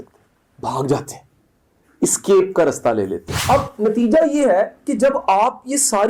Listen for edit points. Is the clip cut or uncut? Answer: cut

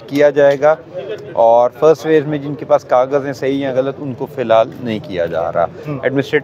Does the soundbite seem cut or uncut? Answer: uncut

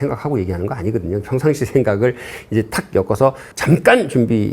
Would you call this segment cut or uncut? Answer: uncut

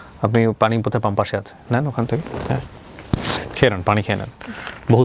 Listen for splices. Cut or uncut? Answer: uncut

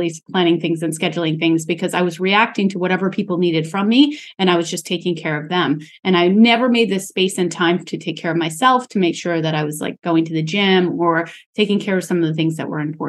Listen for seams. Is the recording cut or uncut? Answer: uncut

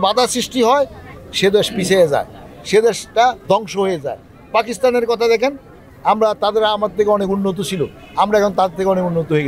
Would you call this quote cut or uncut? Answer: uncut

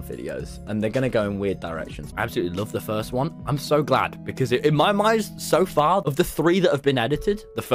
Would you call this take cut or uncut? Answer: cut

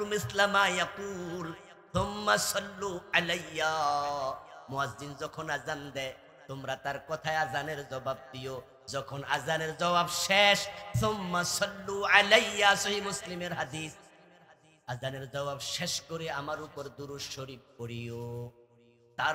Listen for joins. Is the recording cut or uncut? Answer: uncut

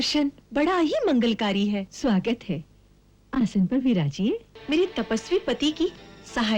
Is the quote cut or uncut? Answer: cut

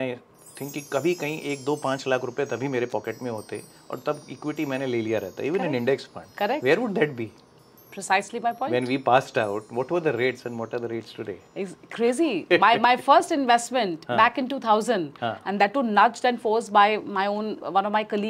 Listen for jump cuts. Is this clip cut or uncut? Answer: uncut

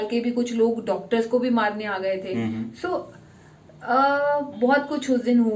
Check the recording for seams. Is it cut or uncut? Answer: uncut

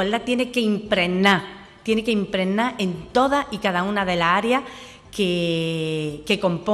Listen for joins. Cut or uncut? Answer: uncut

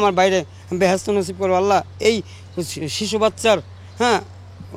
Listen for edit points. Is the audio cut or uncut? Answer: uncut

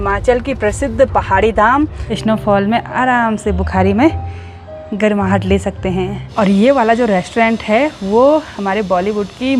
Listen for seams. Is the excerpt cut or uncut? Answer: cut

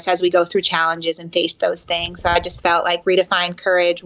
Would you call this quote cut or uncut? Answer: uncut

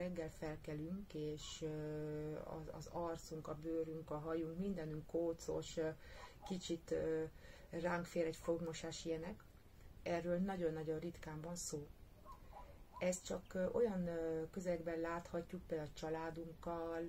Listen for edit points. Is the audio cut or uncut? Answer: uncut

